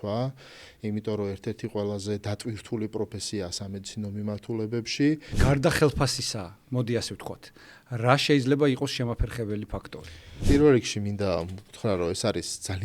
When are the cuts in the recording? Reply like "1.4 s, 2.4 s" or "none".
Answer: 5.4 s, 10.3 s